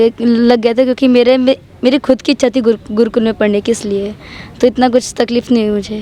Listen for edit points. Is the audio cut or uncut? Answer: uncut